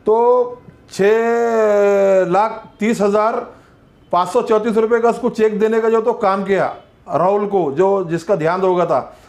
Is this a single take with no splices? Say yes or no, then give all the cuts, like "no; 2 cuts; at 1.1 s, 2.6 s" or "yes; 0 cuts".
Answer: yes; 0 cuts